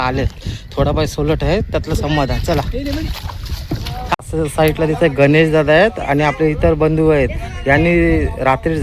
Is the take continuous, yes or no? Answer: no